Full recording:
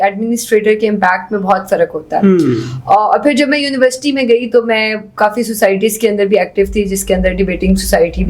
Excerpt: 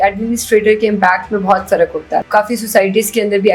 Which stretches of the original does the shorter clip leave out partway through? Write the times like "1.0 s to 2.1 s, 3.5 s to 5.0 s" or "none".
2.2 s to 5.1 s